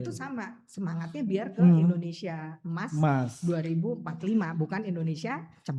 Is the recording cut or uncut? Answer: uncut